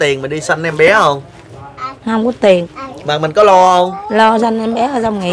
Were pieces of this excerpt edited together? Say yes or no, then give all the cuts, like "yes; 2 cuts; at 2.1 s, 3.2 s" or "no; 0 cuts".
no; 0 cuts